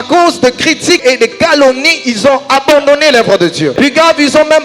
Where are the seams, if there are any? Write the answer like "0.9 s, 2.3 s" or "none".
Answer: 1.0 s, 3.7 s

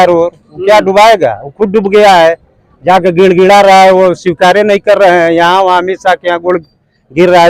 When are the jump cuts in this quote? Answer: none

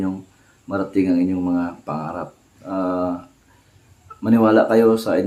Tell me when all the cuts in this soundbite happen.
none

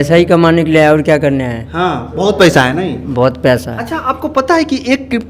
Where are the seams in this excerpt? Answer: 3.8 s

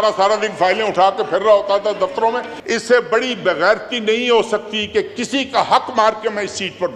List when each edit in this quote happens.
2.5 s

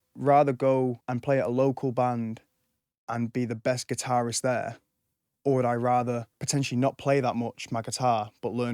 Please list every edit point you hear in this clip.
1.1 s, 6.3 s

